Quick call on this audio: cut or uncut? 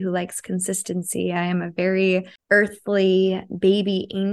cut